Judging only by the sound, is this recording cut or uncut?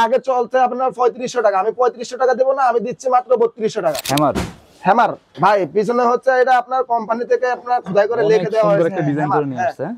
cut